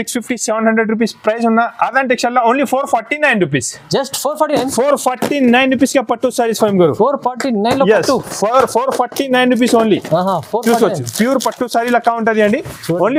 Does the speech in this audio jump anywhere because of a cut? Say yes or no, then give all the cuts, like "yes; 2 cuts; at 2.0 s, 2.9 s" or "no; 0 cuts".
no; 0 cuts